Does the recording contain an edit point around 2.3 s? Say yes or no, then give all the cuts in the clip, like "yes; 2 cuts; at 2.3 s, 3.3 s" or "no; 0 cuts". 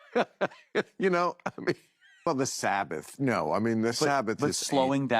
yes; 1 cut; at 2.3 s